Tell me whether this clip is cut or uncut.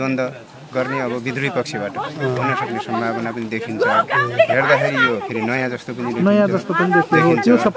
uncut